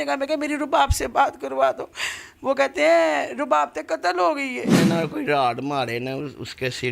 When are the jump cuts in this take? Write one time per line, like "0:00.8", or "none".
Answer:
0:04.7